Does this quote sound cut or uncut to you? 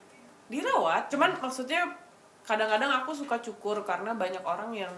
cut